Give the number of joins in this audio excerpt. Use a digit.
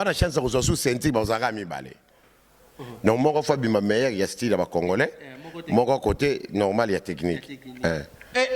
0